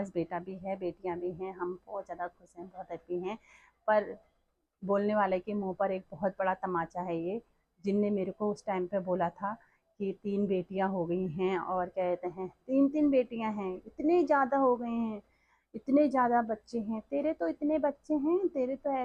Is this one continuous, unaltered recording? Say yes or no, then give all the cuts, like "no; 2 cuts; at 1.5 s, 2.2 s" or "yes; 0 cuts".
yes; 0 cuts